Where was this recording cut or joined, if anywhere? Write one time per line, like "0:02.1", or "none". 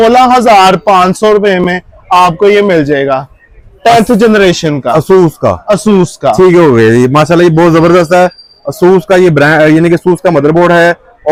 none